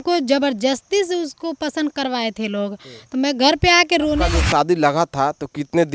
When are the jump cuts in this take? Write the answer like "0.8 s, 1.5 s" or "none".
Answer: 4.2 s